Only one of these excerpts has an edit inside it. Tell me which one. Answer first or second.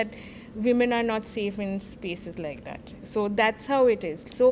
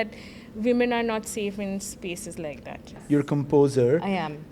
second